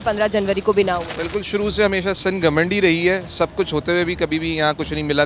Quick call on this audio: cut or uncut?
uncut